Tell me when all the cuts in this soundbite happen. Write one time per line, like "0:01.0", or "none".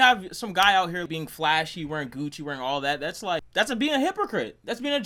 none